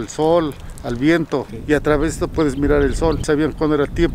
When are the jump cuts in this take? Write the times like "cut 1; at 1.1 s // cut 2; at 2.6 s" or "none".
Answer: cut 1; at 1.5 s // cut 2; at 3.2 s